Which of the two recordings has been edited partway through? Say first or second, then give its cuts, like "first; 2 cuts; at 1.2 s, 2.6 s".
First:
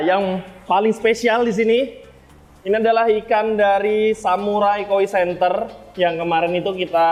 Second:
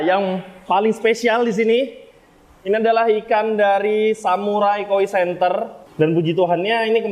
second; 1 cut; at 5.8 s